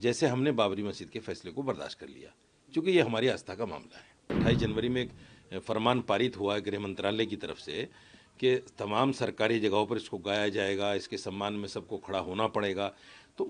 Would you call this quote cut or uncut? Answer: cut